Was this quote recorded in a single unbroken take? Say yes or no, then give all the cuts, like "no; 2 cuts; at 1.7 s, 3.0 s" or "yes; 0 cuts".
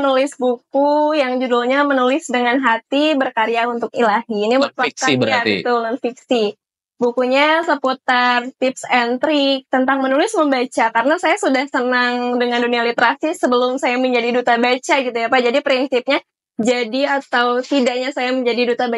yes; 0 cuts